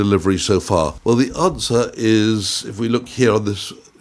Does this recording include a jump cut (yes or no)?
yes